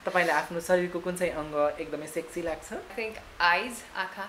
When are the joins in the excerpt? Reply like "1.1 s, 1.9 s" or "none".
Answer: 2.9 s

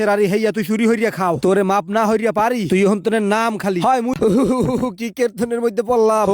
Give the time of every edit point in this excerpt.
4.2 s

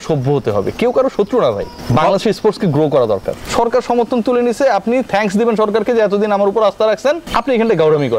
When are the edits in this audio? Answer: 1.7 s, 3.4 s, 7.2 s

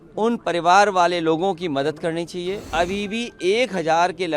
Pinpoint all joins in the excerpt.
2.7 s

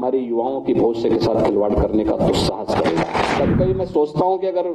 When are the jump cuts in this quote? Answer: 3.4 s

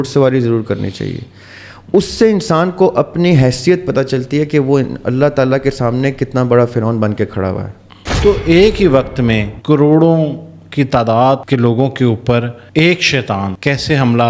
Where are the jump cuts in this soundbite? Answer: 8.0 s

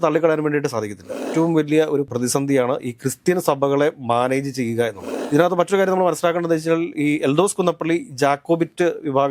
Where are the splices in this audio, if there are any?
1.2 s, 2.1 s, 5.1 s

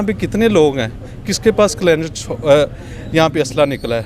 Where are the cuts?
none

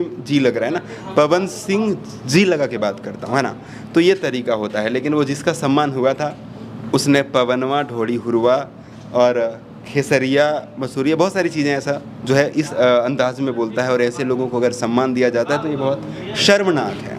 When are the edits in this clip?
none

